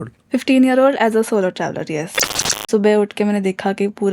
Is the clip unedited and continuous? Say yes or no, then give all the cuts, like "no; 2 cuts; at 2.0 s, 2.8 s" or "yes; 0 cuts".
no; 1 cut; at 2.5 s